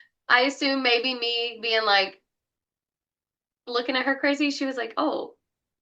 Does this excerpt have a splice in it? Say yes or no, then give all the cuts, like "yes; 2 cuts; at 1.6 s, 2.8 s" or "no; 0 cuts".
no; 0 cuts